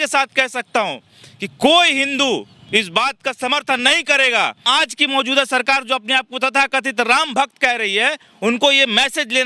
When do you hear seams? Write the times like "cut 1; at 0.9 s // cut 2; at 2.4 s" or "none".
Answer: cut 1; at 4.6 s